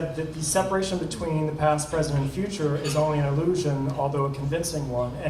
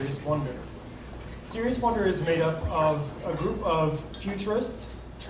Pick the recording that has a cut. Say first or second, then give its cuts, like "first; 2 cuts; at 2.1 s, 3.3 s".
first; 1 cut; at 2.2 s